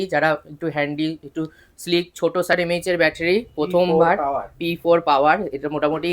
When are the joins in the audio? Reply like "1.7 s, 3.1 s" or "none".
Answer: 2.5 s